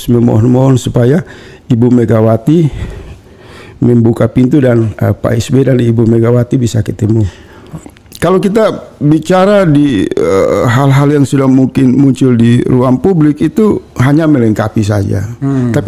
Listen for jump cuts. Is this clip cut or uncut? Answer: uncut